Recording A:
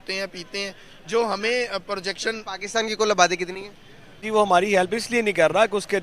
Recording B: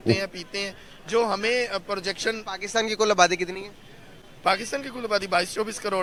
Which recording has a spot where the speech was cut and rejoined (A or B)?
A